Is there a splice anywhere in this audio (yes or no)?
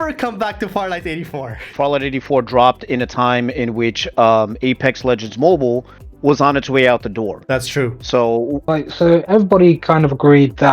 yes